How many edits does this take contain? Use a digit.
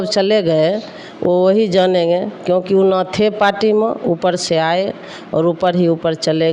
0